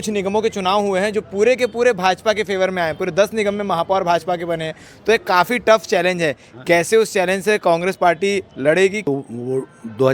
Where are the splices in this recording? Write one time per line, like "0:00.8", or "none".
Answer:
0:09.0